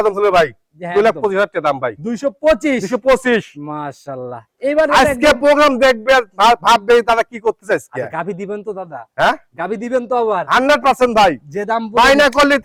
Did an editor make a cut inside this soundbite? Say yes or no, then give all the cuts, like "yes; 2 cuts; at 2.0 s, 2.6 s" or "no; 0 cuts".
no; 0 cuts